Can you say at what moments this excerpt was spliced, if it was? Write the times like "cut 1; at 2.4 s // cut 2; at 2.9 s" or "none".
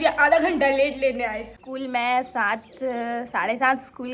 none